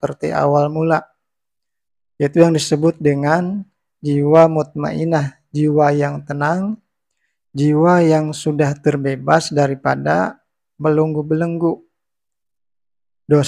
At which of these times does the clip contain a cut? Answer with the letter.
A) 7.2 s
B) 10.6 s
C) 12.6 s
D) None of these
D